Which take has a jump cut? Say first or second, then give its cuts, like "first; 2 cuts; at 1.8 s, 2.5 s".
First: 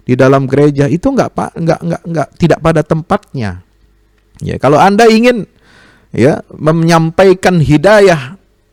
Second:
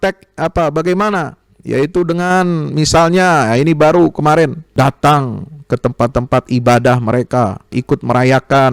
second; 2 cuts; at 4.6 s, 7.8 s